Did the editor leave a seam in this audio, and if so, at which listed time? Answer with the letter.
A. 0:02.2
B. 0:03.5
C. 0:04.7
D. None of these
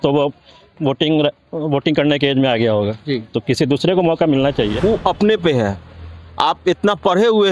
C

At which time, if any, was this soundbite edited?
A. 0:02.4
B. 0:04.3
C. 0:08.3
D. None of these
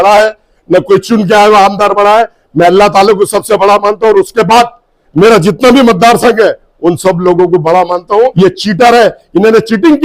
C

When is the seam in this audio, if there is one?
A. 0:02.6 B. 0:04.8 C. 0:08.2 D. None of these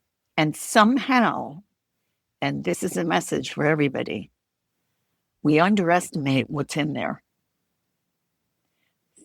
D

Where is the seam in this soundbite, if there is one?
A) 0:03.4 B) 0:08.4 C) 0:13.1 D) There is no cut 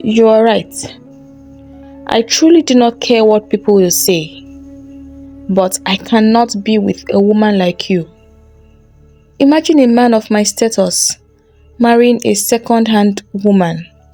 D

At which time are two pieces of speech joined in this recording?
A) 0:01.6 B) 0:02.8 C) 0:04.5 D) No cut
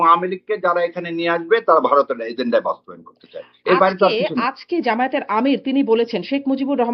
D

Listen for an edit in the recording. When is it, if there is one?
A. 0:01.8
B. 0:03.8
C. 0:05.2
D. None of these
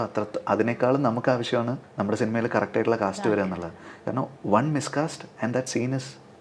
A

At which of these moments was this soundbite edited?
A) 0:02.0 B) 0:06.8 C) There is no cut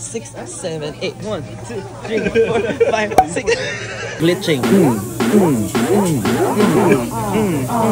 B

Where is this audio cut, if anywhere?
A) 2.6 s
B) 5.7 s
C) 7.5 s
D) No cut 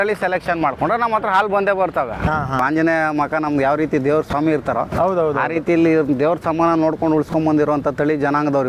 A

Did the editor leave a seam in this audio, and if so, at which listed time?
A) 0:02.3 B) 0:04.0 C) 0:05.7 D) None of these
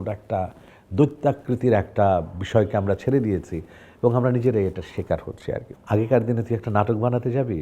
C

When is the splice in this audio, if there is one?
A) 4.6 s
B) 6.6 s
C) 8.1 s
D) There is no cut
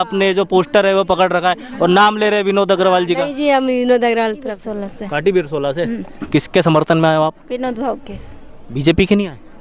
A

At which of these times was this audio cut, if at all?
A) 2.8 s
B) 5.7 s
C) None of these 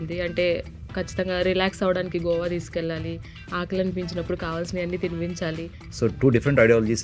B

